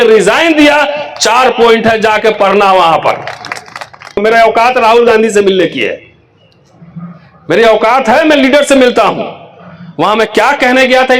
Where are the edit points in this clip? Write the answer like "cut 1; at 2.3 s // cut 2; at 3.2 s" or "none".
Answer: cut 1; at 4.2 s

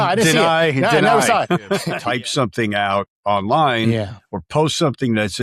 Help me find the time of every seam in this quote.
cut 1; at 1.9 s

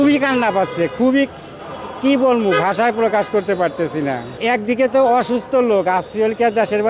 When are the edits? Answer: cut 1; at 4.4 s

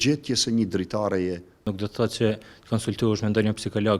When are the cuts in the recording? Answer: cut 1; at 1.7 s

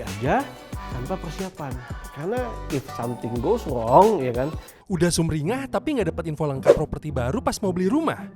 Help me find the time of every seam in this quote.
cut 1; at 4.7 s

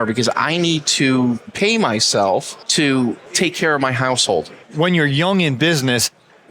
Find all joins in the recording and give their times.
cut 1; at 1.5 s // cut 2; at 2.6 s // cut 3; at 3.2 s // cut 4; at 4.6 s

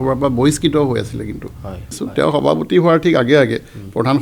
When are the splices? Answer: cut 1; at 2.0 s

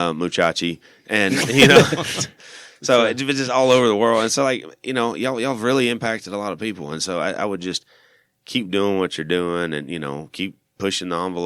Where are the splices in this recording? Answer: none

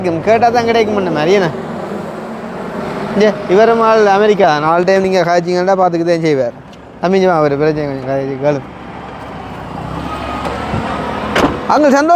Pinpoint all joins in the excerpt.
none

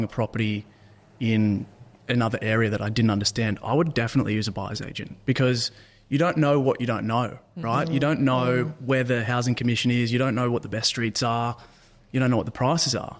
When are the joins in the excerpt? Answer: none

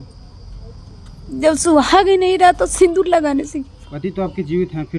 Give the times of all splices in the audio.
none

